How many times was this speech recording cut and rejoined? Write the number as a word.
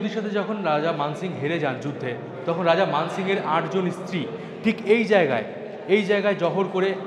zero